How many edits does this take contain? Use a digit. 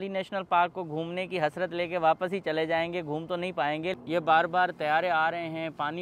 1